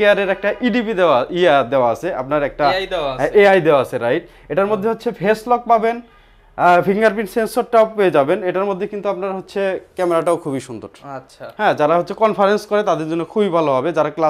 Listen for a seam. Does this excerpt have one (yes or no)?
no